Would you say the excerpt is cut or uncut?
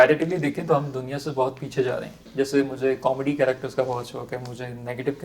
cut